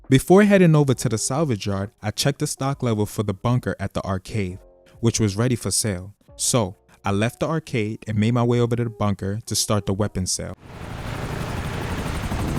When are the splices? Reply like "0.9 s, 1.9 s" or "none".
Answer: 10.8 s